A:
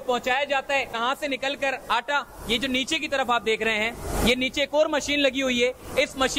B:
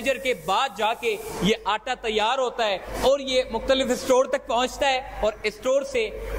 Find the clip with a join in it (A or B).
A